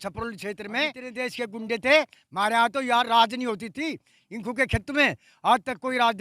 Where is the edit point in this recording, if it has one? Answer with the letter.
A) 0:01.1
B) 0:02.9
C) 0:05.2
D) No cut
A